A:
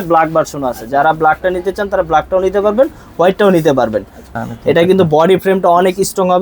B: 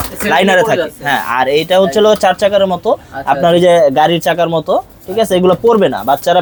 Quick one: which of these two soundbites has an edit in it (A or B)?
A